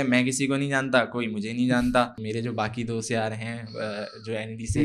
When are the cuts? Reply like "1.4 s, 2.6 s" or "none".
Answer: 2.2 s